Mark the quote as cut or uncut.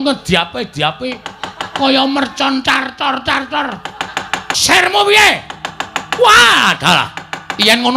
cut